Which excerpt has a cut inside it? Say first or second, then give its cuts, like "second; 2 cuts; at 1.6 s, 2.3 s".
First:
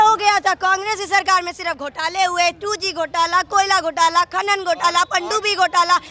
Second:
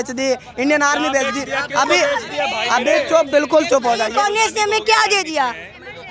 second; 1 cut; at 4.1 s